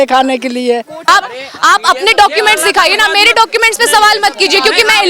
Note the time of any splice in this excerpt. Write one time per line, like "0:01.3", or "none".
0:01.0